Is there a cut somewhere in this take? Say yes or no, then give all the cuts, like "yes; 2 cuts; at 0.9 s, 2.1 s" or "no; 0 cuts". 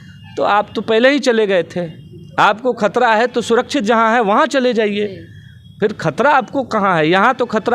no; 0 cuts